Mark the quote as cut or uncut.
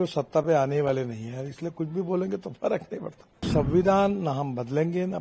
cut